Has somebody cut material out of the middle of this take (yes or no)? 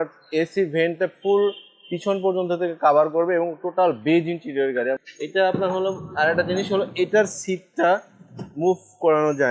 yes